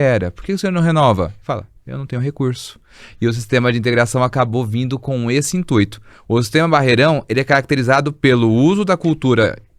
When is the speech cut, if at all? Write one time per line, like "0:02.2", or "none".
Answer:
none